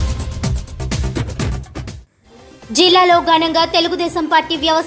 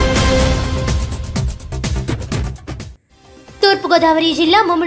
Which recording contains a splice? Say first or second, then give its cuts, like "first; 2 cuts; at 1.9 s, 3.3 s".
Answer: first; 1 cut; at 2.0 s